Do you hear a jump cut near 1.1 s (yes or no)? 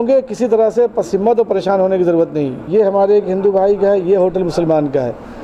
no